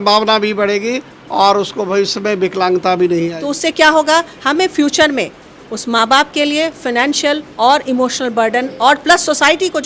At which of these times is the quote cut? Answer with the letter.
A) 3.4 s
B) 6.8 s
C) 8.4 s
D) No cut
A